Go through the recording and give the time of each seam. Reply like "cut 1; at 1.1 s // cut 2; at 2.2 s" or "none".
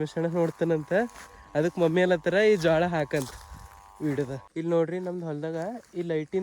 cut 1; at 4.4 s